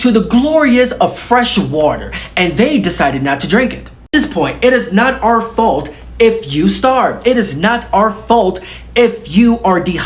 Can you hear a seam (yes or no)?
no